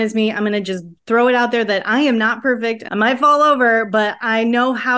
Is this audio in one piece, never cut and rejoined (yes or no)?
no